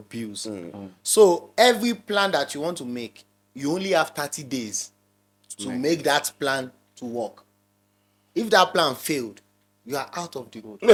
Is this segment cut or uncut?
uncut